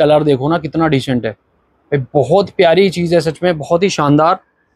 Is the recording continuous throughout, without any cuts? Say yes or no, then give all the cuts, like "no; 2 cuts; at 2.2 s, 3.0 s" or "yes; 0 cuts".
yes; 0 cuts